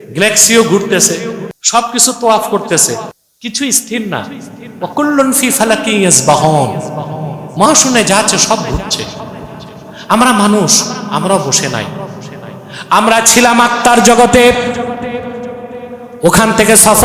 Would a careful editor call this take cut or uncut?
cut